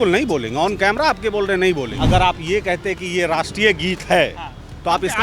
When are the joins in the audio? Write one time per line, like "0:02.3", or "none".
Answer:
0:01.9